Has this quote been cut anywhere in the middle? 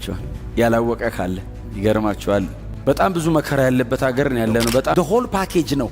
yes; 1 cut; at 4.9 s

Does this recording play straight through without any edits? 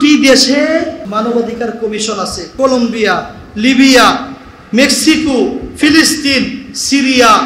no; 2 cuts; at 1.0 s, 2.4 s

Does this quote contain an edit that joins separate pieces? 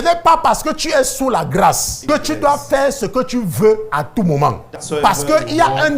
yes; 2 cuts; at 1.9 s, 4.7 s

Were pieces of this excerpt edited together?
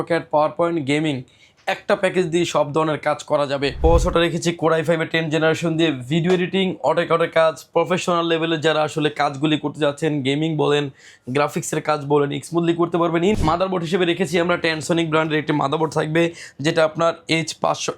yes; 2 cuts; at 3.8 s, 13.4 s

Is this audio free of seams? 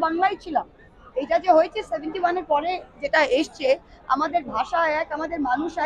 yes; 0 cuts

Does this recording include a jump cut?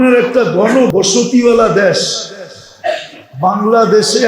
yes; 1 cut; at 0.9 s

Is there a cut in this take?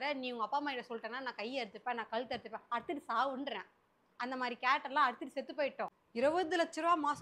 yes; 1 cut; at 5.9 s

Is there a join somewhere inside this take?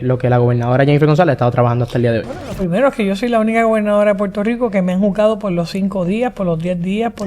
yes; 1 cut; at 2.5 s

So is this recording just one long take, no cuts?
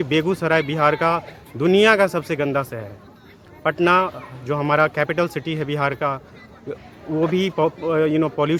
yes; 0 cuts

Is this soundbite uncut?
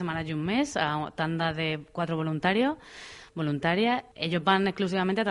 no; 1 cut; at 4.1 s

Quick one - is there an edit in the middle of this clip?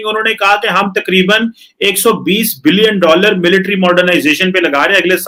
no; 0 cuts

